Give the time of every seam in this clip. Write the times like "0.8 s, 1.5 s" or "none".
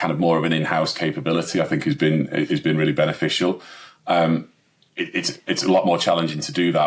none